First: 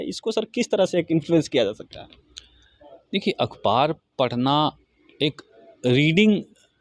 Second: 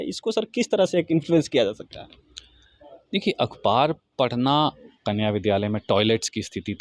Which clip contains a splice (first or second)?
second